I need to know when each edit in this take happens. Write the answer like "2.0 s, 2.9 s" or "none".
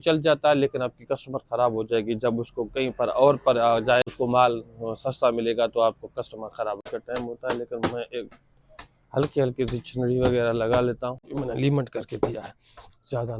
4.1 s, 6.8 s, 11.3 s